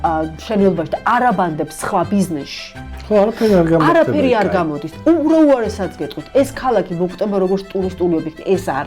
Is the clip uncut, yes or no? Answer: yes